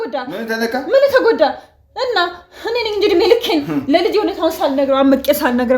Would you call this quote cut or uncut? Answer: uncut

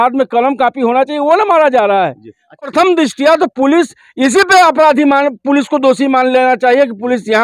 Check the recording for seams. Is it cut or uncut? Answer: cut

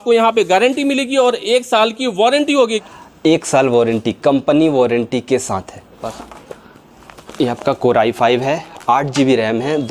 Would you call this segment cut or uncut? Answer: cut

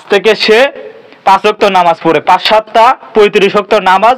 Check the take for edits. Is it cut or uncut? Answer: uncut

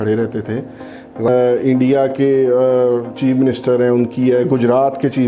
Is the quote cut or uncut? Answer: cut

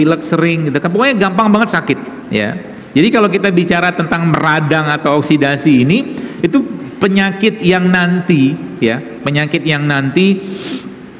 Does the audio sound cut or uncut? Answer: cut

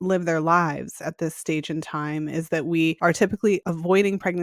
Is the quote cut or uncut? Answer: cut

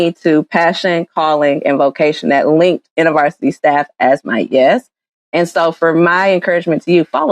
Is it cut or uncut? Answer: uncut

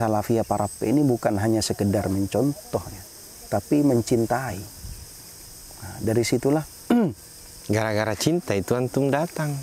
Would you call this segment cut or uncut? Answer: uncut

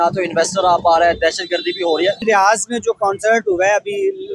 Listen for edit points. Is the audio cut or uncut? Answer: cut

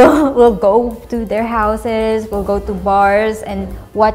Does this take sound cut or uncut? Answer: uncut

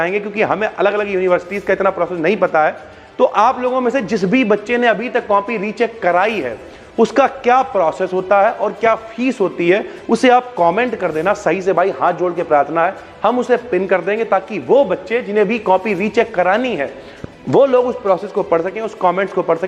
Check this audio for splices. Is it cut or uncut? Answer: uncut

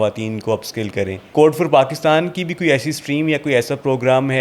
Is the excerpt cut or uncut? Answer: uncut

